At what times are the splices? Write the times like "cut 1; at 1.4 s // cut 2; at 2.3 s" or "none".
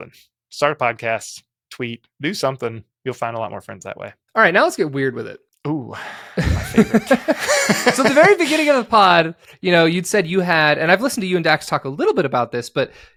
none